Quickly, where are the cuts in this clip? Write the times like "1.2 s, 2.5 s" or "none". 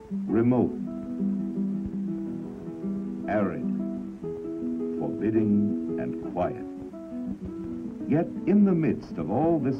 1.2 s